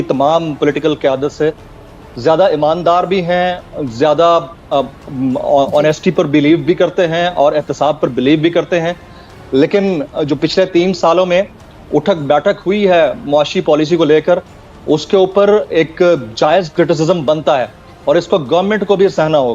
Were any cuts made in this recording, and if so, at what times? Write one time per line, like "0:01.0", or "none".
none